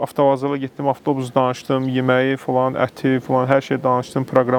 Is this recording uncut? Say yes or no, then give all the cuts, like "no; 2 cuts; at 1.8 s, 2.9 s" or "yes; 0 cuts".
yes; 0 cuts